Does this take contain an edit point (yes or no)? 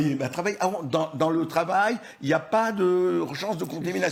no